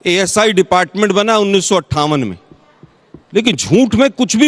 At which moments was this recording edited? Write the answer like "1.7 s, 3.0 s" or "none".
none